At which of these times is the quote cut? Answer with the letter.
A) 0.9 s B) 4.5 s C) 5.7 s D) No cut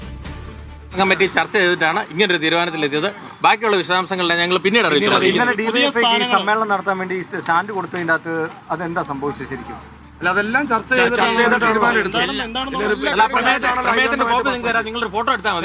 A